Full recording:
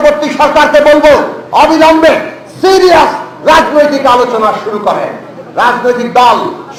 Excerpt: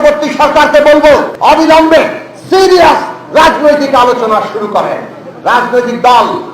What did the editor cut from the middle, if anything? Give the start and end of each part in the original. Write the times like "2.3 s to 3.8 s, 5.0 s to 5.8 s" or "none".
1.3 s to 1.4 s